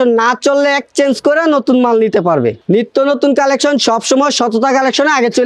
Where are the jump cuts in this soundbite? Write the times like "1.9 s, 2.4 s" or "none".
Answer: 2.6 s